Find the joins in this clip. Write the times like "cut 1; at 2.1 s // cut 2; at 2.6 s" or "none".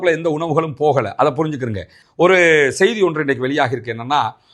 cut 1; at 2.0 s

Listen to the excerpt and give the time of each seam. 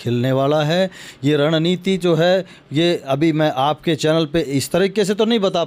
none

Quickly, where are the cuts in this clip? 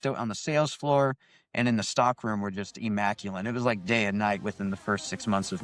none

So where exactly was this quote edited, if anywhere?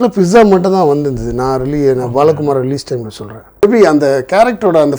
cut 1; at 3.6 s

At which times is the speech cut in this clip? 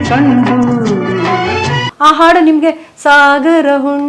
cut 1; at 1.9 s

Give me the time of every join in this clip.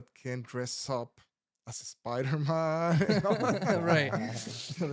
none

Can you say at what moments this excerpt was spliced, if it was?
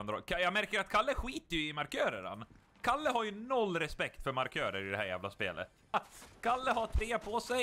cut 1; at 5.9 s

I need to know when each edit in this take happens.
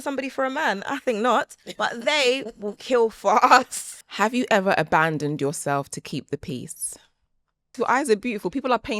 cut 1; at 3.8 s // cut 2; at 7.7 s

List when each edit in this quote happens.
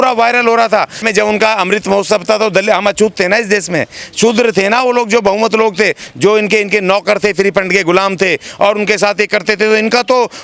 cut 1; at 1.0 s

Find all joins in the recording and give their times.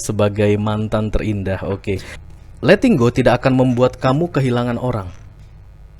cut 1; at 2.1 s

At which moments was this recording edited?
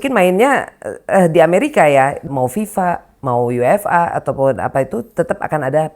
cut 1; at 2.3 s

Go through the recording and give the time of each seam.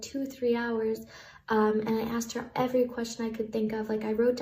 none

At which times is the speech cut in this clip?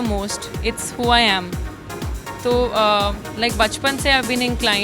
none

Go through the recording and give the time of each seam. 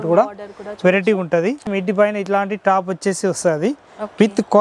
cut 1; at 1.6 s

